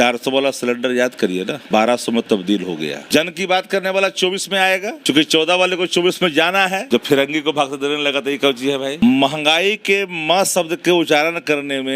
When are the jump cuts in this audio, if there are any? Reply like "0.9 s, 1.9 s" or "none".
1.6 s, 3.1 s, 4.9 s, 6.8 s, 9.0 s